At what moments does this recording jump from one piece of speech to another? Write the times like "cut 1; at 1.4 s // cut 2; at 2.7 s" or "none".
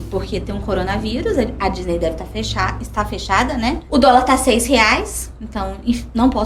cut 1; at 3.8 s